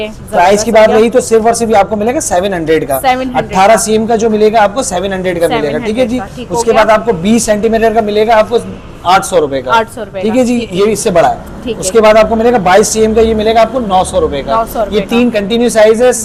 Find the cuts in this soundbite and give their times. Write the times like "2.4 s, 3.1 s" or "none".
none